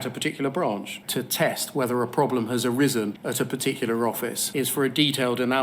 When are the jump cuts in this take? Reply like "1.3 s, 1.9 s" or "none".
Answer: 1.0 s, 3.2 s, 4.4 s

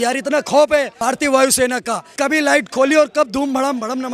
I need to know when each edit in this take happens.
1.2 s, 2.0 s

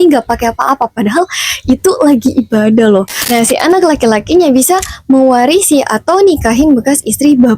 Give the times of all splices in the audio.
3.2 s

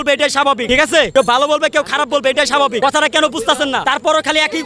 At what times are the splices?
0.9 s, 2.8 s, 3.8 s

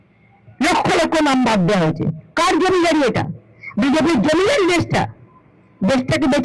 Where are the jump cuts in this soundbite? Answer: none

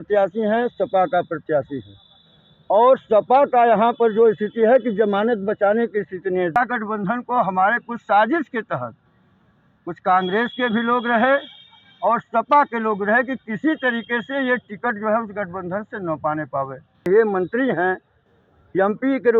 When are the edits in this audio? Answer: 6.5 s, 17.1 s

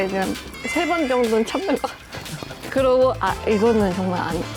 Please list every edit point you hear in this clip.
2.5 s

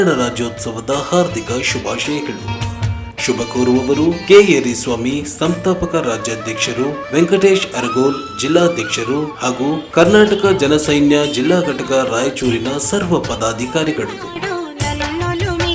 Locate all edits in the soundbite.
none

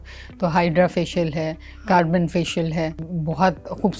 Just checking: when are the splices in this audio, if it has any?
3.0 s

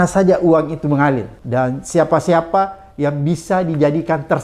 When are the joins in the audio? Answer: 1.4 s

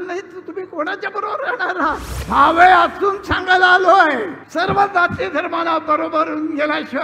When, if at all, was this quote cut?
2.1 s, 4.4 s

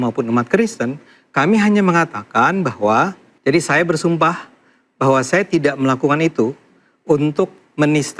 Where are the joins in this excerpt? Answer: 3.3 s

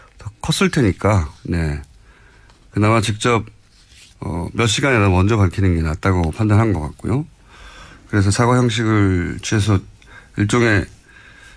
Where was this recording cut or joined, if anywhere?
none

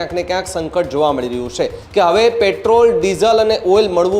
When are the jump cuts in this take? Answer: 1.8 s

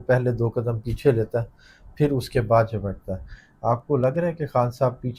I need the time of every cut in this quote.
none

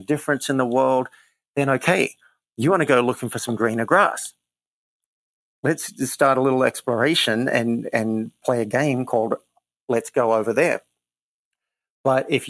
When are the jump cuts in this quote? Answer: none

